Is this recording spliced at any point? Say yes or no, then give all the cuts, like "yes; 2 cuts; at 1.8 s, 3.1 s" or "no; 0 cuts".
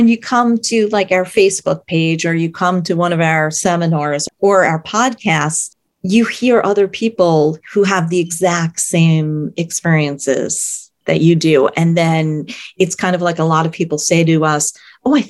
no; 0 cuts